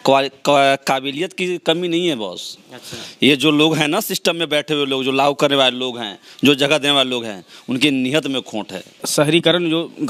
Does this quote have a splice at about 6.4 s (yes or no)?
no